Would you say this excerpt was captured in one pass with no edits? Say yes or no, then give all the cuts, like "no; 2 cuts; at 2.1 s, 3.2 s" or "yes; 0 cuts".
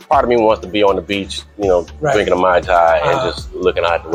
yes; 0 cuts